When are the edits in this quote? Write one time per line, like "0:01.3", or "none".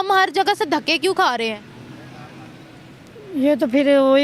none